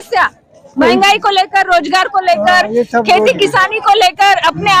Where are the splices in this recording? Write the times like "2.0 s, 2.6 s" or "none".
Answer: none